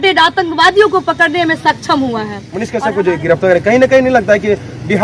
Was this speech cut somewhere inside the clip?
yes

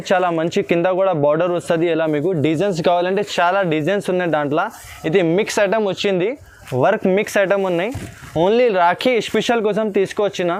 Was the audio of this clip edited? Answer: no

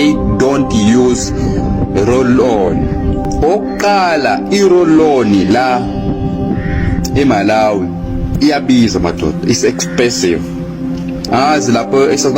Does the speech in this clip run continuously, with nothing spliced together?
no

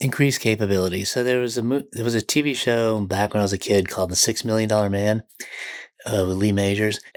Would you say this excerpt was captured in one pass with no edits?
yes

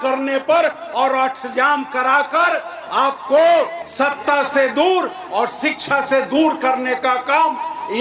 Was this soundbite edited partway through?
no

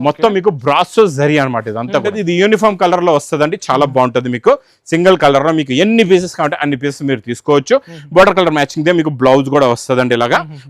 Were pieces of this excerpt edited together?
yes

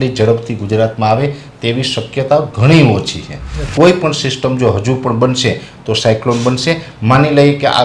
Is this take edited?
yes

